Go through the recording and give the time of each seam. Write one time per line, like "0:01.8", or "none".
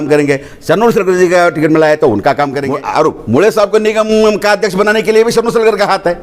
0:02.6